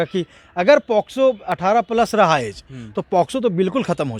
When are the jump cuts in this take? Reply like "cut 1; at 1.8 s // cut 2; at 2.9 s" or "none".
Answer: none